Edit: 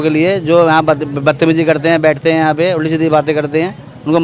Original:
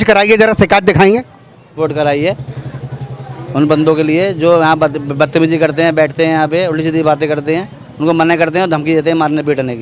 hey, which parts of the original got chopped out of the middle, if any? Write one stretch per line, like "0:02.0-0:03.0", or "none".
none